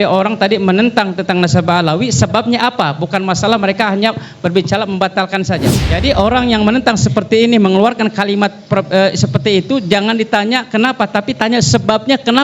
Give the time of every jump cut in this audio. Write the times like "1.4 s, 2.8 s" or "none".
5.7 s

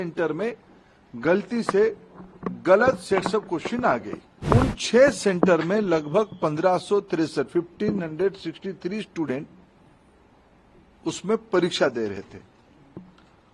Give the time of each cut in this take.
4.3 s

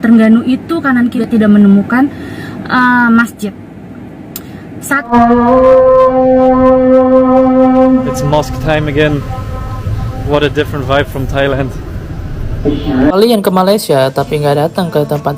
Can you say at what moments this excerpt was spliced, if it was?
1.2 s, 5.1 s, 13.1 s

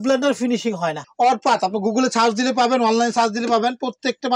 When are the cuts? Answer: 1.0 s

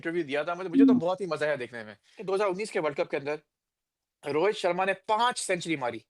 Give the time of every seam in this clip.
2.2 s

